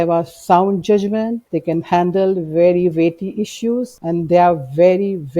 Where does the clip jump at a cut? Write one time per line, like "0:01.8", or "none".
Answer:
0:01.4
0:03.9